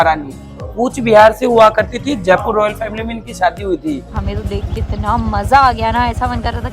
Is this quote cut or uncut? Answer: cut